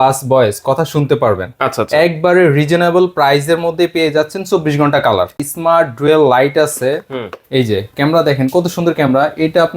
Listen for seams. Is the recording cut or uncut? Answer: cut